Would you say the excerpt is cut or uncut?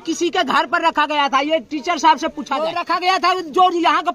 cut